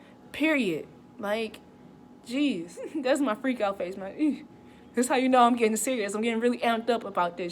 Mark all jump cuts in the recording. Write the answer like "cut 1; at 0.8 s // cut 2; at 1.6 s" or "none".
cut 1; at 2.9 s